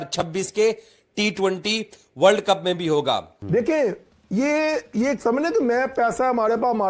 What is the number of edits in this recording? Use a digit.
1